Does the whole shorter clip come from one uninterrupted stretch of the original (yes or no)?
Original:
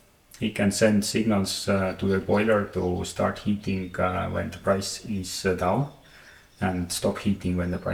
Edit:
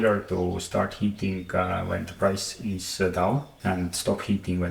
no